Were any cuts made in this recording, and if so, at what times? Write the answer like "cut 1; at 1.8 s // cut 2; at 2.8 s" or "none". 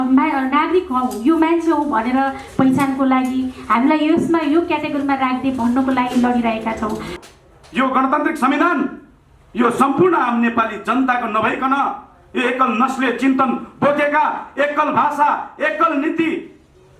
cut 1; at 7.1 s